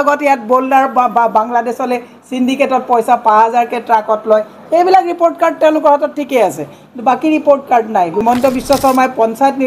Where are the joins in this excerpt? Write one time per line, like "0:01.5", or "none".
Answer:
0:08.2